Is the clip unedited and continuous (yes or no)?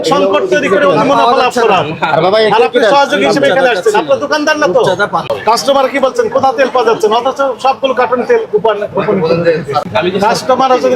no